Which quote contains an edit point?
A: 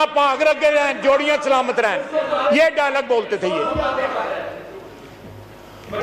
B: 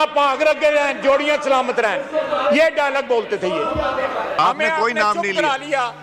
B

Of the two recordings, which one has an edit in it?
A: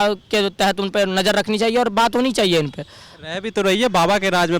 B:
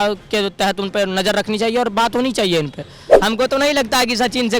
B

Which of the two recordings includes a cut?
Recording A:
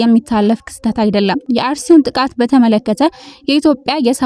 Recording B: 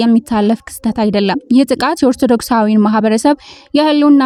A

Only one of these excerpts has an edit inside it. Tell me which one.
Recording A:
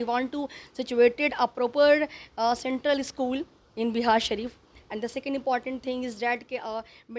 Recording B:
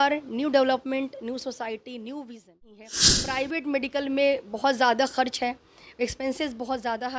B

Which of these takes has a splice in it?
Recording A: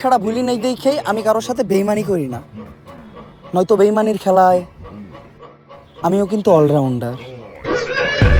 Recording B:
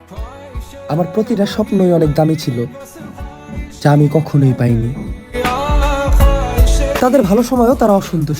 B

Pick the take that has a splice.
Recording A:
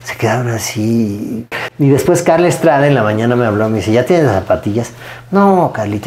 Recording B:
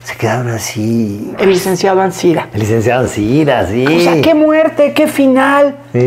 B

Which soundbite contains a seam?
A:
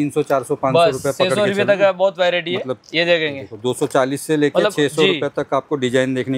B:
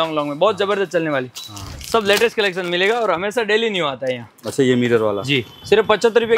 B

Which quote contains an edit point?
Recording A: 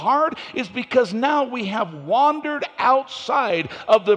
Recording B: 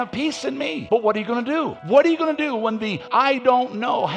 B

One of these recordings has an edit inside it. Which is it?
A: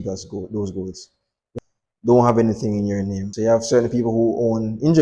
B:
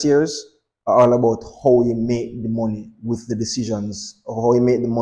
A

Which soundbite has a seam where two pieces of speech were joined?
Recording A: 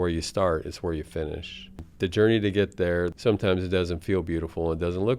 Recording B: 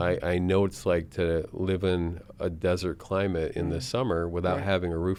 A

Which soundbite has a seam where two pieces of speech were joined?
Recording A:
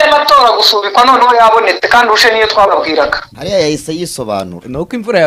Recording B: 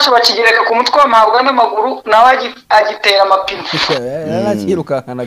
A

